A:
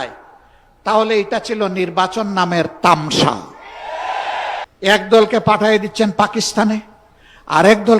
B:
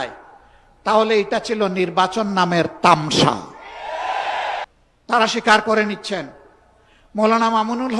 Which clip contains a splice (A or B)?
A